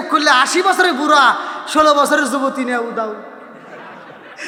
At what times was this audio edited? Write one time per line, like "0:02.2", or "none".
none